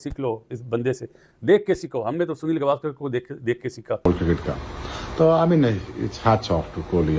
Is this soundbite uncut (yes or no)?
no